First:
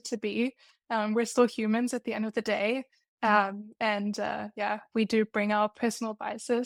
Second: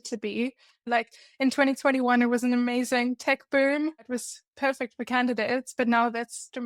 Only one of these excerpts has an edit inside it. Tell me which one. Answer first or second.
second